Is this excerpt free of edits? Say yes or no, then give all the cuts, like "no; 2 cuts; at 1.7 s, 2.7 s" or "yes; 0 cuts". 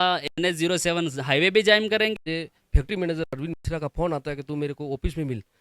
no; 1 cut; at 2.2 s